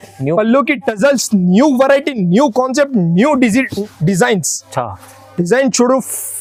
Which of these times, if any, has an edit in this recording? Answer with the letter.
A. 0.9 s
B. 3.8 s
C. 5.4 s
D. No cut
D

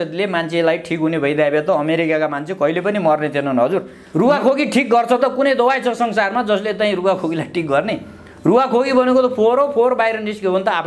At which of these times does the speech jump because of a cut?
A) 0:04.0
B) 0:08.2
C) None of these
A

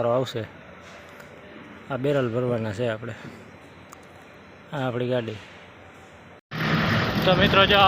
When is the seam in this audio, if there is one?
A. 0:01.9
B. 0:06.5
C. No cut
B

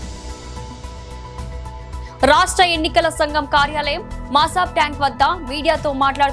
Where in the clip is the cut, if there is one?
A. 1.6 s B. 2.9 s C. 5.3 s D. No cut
A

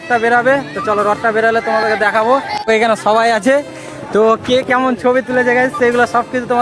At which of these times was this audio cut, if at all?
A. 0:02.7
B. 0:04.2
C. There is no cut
A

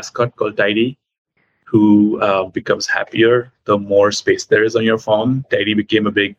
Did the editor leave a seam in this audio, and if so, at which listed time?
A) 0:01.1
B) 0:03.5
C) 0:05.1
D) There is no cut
D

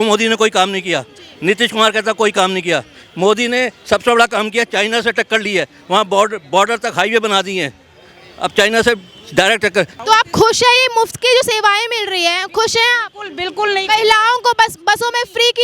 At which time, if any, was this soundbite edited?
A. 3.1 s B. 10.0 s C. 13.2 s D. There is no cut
B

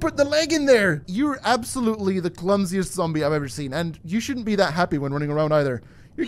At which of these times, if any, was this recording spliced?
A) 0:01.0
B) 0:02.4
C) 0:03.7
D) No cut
A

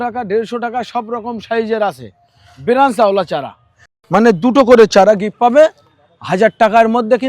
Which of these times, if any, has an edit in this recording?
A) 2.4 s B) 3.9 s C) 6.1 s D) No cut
B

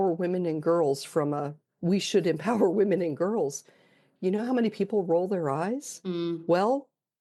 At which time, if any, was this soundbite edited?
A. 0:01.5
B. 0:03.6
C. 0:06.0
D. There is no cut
D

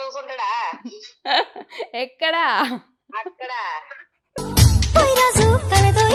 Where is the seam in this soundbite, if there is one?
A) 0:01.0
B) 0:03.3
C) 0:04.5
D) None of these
D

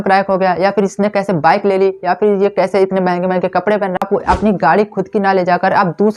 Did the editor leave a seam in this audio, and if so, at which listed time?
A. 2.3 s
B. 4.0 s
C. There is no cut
B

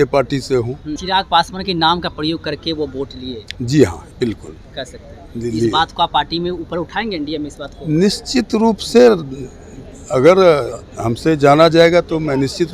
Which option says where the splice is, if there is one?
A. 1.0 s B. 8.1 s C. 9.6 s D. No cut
A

